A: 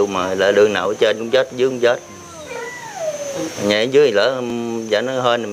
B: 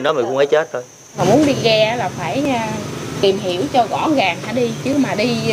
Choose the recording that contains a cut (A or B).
B